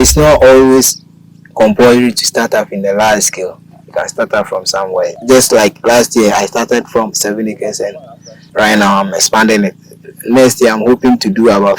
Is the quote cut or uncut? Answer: cut